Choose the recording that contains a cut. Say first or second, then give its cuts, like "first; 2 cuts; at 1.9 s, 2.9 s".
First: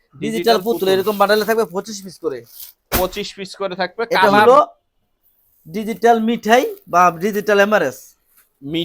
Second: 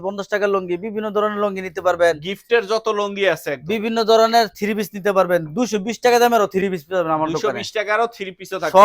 first; 1 cut; at 4.4 s